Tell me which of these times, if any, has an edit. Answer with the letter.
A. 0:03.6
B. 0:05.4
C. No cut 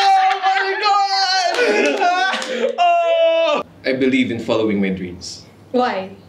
A